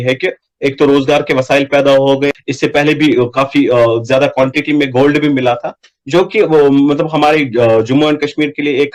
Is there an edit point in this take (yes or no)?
no